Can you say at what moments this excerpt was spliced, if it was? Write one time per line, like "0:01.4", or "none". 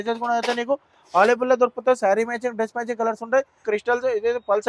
0:03.6